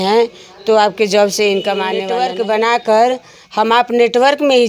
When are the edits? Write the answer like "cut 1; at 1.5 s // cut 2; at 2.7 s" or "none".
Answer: cut 1; at 2.0 s